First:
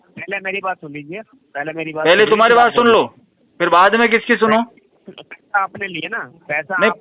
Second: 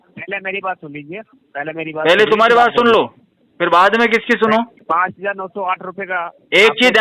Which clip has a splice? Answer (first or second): second